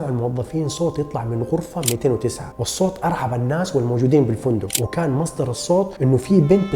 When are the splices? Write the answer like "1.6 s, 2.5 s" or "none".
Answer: 2.4 s